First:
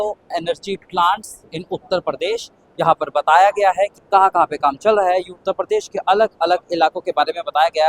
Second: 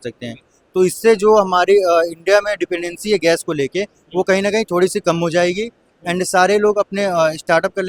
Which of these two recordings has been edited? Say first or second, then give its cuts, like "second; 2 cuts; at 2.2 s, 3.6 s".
first; 1 cut; at 4.0 s